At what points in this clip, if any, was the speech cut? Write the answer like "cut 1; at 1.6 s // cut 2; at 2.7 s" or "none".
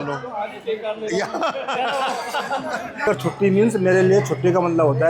cut 1; at 3.0 s